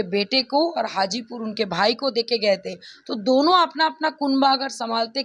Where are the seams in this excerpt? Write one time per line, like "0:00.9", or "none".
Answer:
none

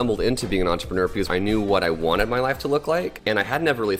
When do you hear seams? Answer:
0:01.3
0:03.2

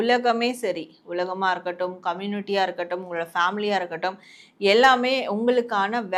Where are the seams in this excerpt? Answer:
none

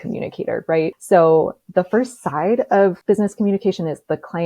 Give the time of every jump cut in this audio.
0:00.9
0:03.0

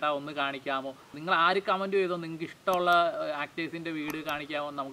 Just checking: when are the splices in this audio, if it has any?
0:01.1

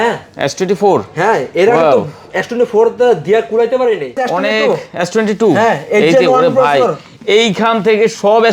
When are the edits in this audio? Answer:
0:04.2

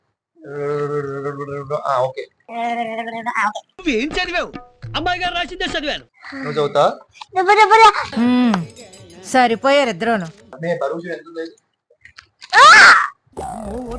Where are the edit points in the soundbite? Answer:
0:08.0
0:10.4

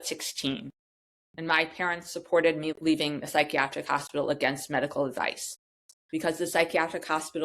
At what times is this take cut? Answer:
0:02.8

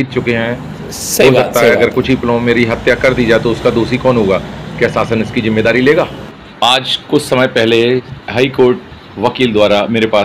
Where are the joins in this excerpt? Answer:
0:06.2
0:08.1

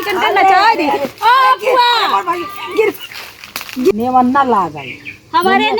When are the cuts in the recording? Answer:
0:03.9

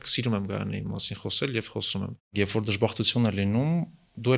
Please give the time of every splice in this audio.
0:02.3

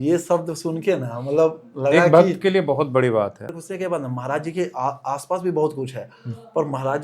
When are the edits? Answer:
0:03.6

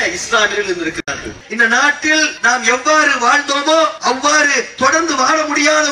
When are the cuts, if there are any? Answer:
0:01.4
0:02.3
0:04.0

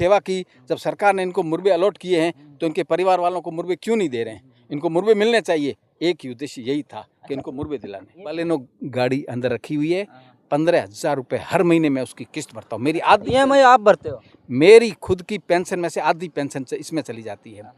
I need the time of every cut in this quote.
0:08.3

